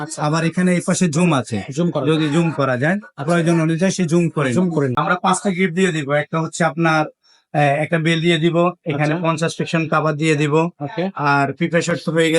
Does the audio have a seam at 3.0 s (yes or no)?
no